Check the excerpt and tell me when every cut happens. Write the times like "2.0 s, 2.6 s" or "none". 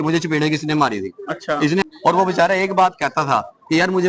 1.8 s